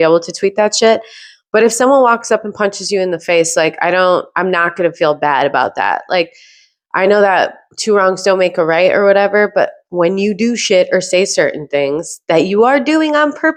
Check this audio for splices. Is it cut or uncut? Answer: uncut